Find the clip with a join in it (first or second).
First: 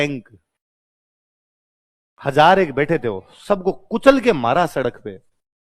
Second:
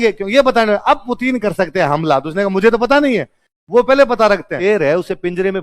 second